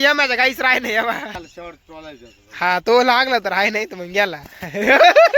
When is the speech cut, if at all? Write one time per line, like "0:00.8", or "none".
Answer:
0:01.4